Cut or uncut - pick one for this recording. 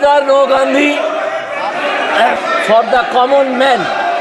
cut